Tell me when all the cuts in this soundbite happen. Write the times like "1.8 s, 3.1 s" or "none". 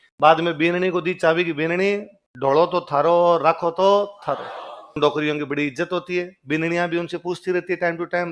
5.0 s